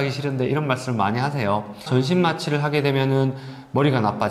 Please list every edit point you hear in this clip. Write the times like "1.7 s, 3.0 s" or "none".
1.9 s